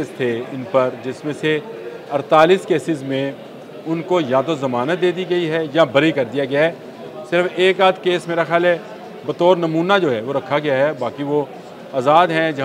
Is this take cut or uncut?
uncut